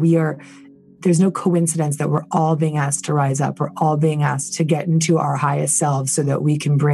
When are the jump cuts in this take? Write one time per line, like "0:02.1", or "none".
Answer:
0:00.9